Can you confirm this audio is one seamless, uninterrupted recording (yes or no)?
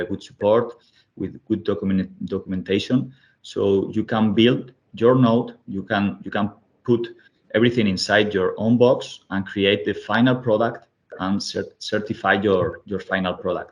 yes